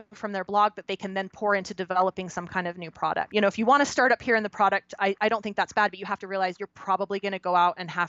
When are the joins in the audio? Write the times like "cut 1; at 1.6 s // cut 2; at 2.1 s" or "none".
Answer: cut 1; at 3.3 s

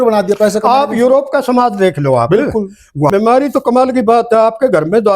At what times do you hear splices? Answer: cut 1; at 3.1 s

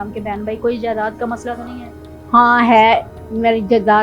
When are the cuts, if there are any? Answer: none

